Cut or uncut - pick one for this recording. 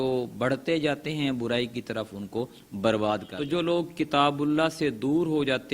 cut